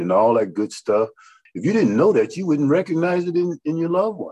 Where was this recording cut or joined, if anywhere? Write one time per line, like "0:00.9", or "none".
0:01.4